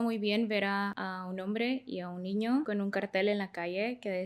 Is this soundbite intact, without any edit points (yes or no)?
no